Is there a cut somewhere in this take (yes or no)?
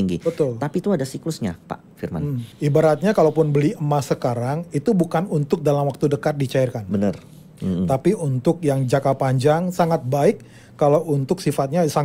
yes